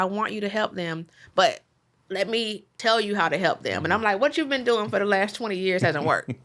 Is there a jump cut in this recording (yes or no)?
yes